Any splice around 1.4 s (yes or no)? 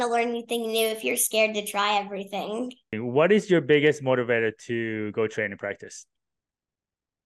no